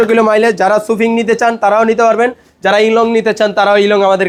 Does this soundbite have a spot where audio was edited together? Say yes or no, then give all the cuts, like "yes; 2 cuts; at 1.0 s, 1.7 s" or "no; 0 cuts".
no; 0 cuts